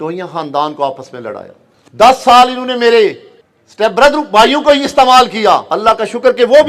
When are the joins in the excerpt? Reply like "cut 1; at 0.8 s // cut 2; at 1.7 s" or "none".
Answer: cut 1; at 5.7 s